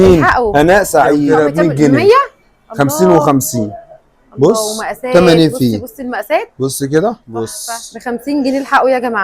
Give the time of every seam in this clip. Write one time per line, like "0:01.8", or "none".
0:01.3
0:07.6